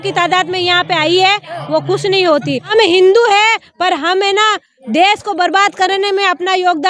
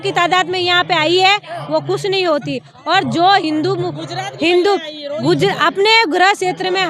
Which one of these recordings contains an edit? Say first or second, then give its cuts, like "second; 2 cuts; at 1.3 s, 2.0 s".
first; 1 cut; at 2.7 s